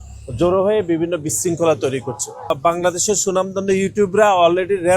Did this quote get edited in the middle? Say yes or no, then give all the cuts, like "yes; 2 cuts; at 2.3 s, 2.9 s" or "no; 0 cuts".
yes; 1 cut; at 2.5 s